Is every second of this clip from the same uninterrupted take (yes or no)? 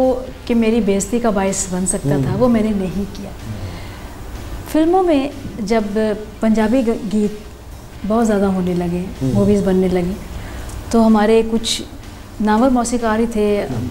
yes